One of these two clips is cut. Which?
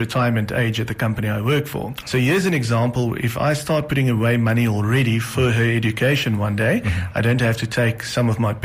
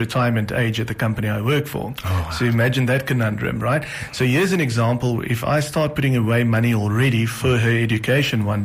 first; 1 cut; at 2.0 s

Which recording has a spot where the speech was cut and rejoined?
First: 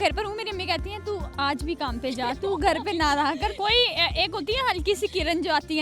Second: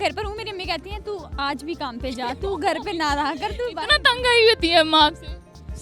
first; 1 cut; at 3.5 s

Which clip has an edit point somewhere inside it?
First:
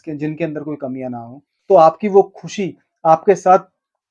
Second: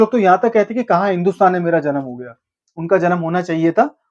first; 1 cut; at 1.5 s

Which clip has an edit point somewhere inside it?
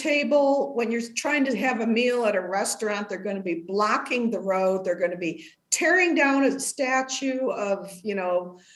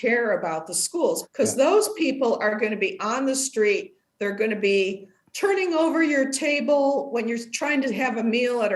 second; 1 cut; at 1.2 s

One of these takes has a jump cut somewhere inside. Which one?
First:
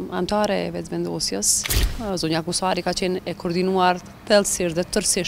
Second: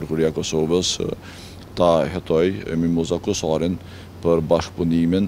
first; 1 cut; at 1.9 s

